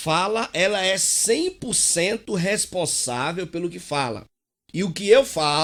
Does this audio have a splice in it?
no; 0 cuts

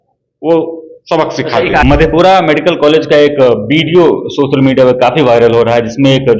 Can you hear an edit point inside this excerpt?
yes; 1 cut; at 1.8 s

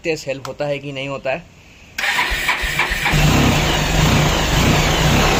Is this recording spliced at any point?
no; 0 cuts

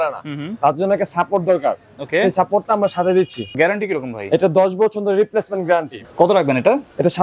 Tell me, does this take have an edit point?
yes; 2 cuts; at 3.5 s, 5.9 s

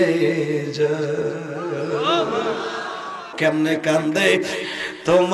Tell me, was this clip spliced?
yes; 1 cut; at 3.3 s

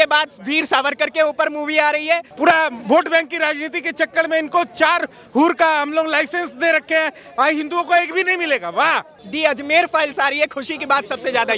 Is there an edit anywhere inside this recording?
yes; 2 cuts; at 2.3 s, 9.2 s

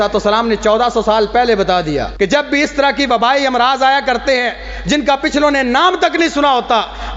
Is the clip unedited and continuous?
no; 1 cut; at 2.1 s

